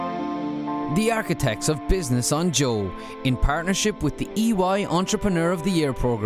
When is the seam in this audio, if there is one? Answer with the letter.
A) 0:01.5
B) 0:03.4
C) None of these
C